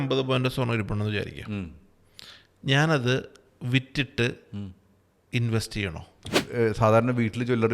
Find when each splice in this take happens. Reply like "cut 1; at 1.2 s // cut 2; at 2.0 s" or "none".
cut 1; at 6.4 s